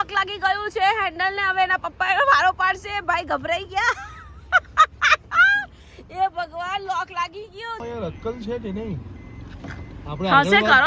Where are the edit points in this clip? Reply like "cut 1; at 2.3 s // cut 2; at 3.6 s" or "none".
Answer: cut 1; at 7.8 s